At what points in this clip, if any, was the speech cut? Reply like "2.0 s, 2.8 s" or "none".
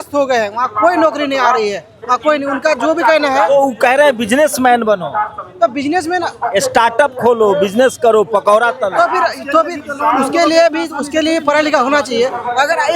none

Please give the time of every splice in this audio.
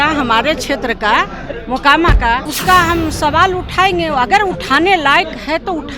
2.5 s

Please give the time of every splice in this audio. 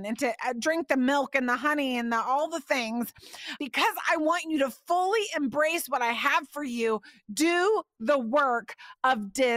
3.6 s

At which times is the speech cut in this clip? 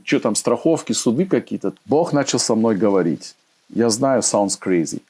1.7 s

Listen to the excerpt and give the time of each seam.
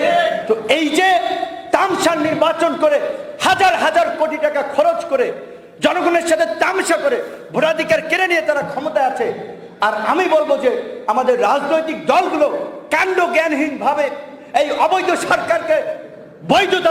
none

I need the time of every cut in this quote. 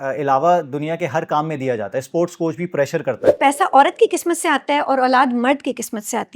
3.3 s

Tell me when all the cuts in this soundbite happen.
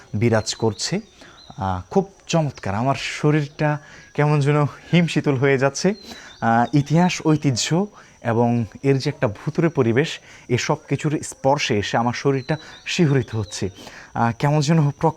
none

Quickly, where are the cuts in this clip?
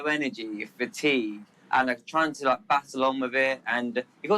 1.5 s

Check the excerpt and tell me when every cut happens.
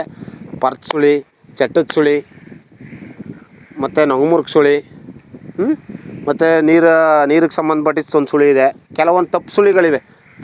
none

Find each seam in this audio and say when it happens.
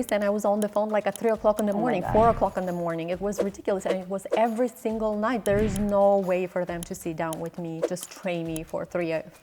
5.4 s, 7.8 s

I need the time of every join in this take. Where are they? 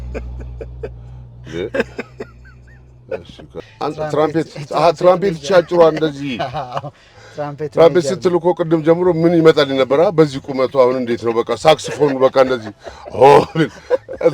3.6 s

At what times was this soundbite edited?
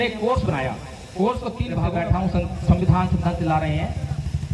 1.7 s

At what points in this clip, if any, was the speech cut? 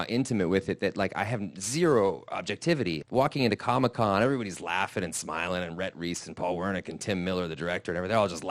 3.0 s

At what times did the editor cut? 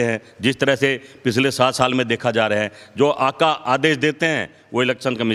none

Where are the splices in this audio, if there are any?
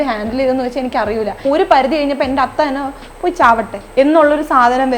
1.4 s, 3.8 s

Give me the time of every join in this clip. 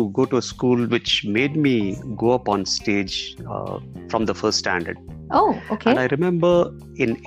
none

